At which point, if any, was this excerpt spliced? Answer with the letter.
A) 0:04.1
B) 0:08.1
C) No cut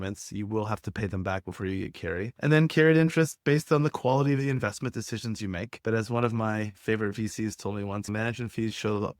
B